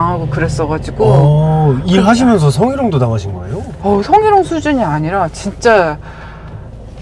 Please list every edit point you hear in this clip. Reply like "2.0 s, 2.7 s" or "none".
none